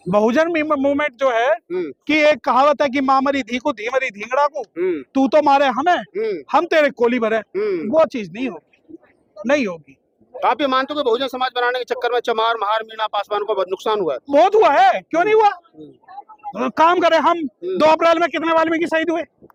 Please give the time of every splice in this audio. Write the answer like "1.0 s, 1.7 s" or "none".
none